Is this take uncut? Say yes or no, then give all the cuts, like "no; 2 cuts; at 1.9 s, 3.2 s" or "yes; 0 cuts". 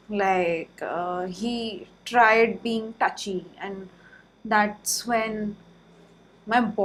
yes; 0 cuts